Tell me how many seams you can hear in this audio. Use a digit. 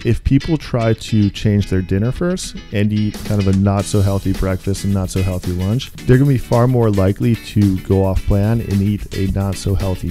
2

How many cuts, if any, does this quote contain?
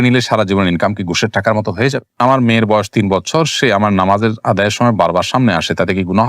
1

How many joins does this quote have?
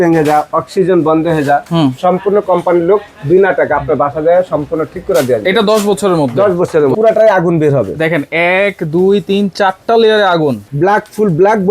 2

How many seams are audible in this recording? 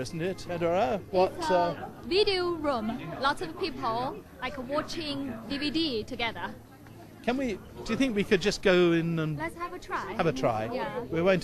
1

